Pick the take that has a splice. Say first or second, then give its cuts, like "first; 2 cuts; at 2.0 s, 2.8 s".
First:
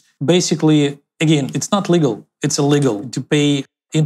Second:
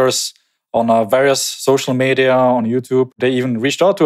second; 1 cut; at 3.1 s